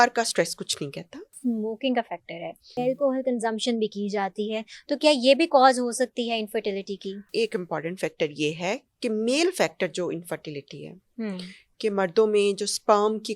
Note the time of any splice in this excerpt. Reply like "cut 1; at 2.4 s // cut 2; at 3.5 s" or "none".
cut 1; at 1.4 s // cut 2; at 2.8 s // cut 3; at 7.3 s